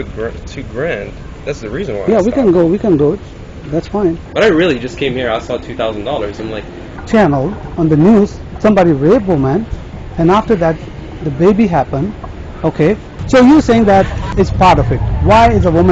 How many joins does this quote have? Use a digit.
4